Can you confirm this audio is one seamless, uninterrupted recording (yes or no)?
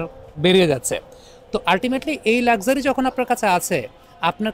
yes